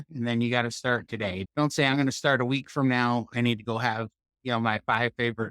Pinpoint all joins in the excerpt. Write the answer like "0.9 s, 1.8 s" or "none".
1.4 s